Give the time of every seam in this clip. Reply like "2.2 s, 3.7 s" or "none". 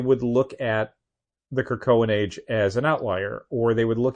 none